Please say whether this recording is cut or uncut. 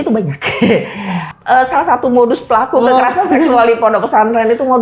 cut